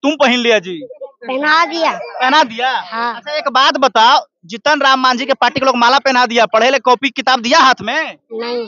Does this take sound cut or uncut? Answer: uncut